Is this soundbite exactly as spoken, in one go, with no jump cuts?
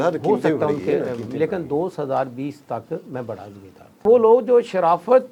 no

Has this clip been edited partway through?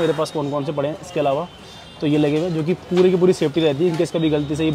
no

